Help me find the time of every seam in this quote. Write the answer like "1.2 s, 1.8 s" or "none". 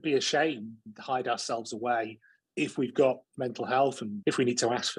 3.3 s, 4.1 s